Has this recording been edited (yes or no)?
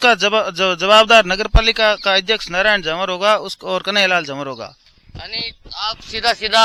no